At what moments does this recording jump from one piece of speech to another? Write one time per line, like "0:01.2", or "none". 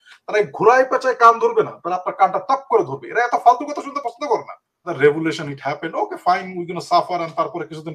0:04.9